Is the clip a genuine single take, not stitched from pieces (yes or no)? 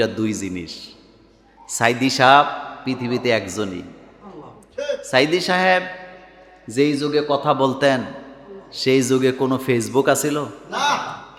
yes